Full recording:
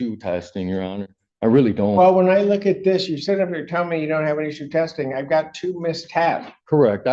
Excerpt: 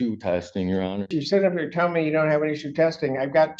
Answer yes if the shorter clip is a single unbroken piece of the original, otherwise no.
no